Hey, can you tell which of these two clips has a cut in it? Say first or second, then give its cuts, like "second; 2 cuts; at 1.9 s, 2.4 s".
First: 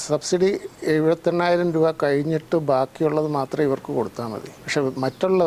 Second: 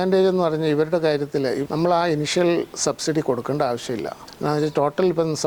second; 1 cut; at 1.6 s